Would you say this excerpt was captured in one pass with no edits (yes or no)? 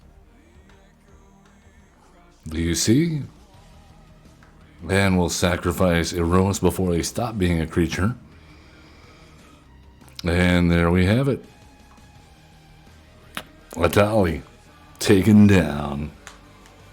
no